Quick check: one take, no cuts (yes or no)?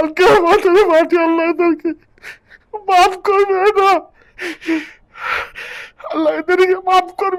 yes